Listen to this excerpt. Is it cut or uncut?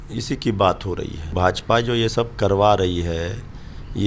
cut